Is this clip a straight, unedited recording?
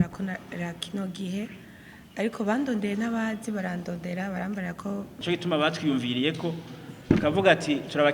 no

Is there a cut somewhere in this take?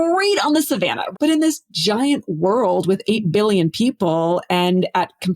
yes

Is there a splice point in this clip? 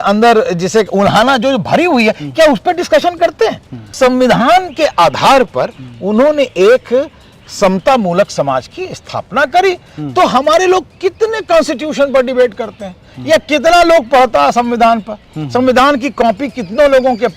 yes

